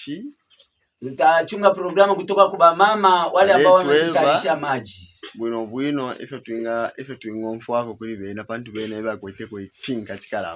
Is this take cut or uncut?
uncut